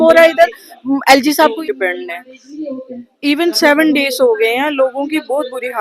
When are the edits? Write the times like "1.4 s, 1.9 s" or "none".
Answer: 1.6 s